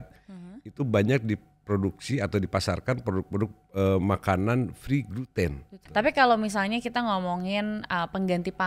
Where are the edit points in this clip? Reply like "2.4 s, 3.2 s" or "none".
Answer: 5.7 s

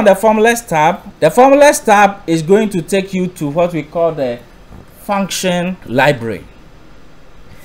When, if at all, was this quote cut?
1.1 s, 5.8 s

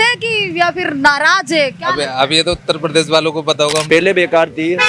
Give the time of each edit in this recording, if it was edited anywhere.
3.8 s

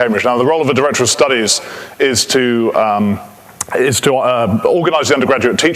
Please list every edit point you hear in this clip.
4.4 s

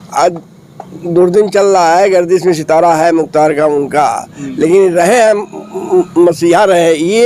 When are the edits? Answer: none

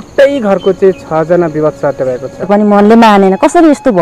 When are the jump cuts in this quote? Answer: 2.5 s

